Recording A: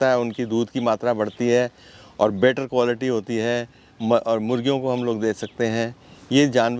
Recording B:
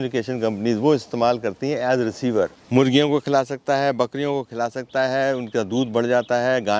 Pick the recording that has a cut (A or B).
B